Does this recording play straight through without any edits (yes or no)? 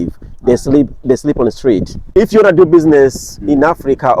no